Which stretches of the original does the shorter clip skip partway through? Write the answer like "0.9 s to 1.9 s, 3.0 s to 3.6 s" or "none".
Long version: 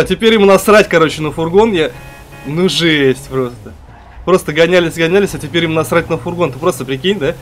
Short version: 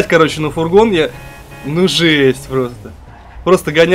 none